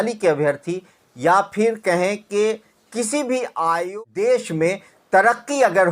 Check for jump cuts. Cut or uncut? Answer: cut